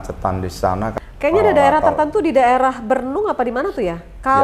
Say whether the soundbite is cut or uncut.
cut